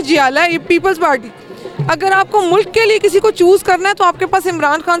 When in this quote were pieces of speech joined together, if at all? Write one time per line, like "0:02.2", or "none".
none